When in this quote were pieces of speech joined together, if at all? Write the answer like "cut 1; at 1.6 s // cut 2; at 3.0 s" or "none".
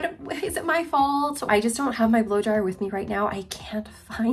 cut 1; at 1.5 s